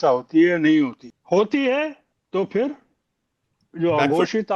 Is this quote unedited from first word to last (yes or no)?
no